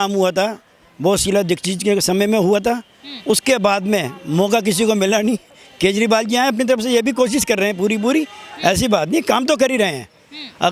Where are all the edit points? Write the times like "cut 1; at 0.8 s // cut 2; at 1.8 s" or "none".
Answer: none